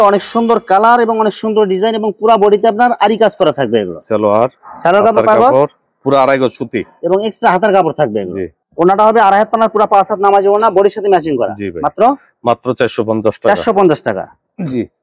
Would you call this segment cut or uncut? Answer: uncut